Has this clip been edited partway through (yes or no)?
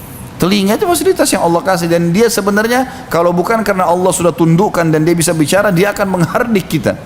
no